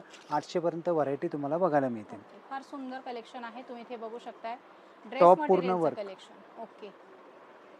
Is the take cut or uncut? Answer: uncut